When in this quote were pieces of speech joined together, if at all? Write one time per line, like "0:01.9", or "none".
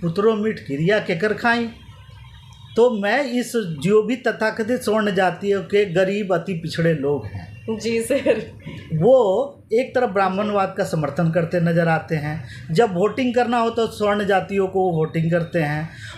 none